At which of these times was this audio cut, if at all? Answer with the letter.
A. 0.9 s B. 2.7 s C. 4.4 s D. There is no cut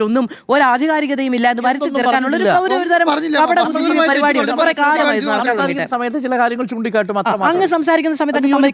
D